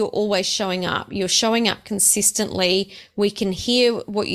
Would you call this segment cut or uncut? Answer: uncut